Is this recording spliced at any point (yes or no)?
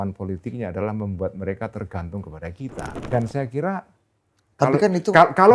yes